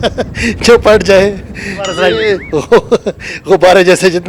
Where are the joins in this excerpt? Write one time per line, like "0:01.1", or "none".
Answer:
0:02.4